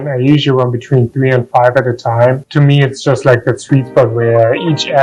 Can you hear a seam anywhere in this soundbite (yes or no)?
no